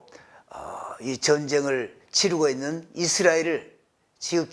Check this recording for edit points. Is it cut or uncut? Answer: uncut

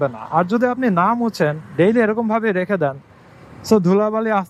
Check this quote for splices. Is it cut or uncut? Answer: uncut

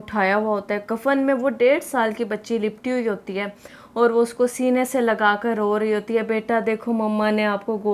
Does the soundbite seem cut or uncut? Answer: uncut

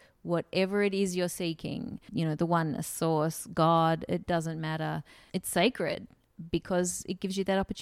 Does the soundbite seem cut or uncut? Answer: cut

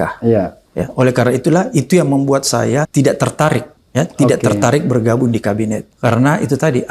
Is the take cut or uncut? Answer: cut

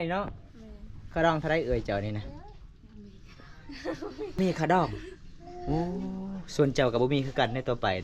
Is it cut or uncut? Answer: cut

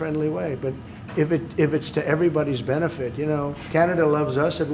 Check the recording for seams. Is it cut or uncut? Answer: uncut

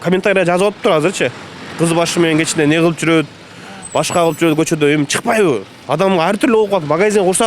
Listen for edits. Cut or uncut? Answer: uncut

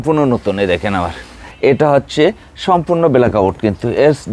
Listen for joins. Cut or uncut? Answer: cut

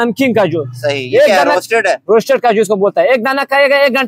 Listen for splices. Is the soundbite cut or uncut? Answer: uncut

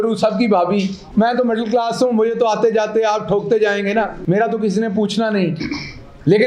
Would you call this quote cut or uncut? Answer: cut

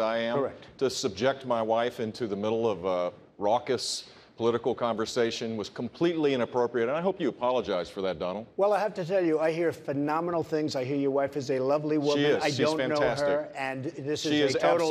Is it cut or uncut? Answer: uncut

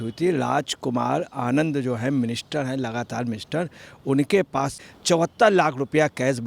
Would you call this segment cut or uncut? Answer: cut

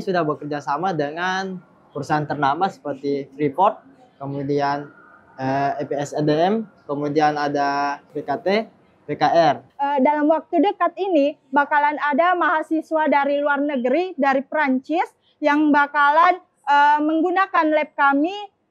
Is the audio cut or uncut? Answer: cut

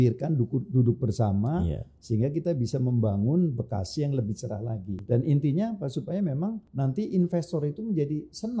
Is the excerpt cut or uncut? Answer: cut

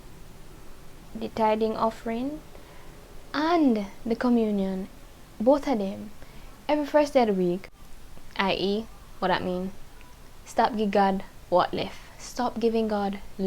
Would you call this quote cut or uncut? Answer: cut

